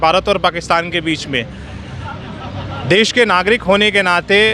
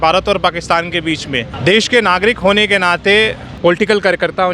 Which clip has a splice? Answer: second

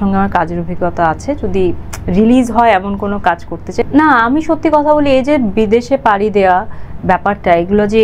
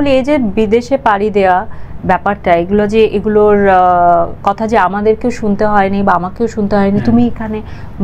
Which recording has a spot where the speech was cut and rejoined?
first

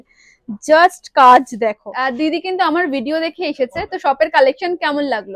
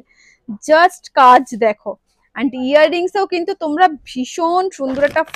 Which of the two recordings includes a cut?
first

